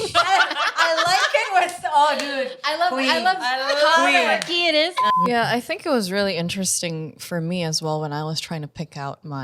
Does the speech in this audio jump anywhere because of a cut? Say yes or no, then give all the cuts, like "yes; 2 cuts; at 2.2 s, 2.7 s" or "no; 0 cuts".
yes; 1 cut; at 5.0 s